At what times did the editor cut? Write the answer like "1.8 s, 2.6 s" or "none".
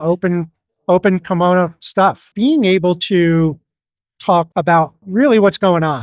2.3 s, 4.5 s